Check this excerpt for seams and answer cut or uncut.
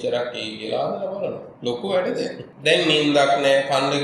cut